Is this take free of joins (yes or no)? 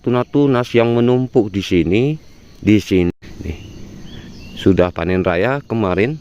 no